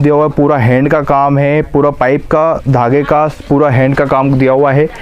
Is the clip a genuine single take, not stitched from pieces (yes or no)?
yes